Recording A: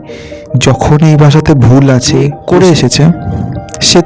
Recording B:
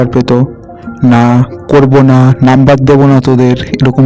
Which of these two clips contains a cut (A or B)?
A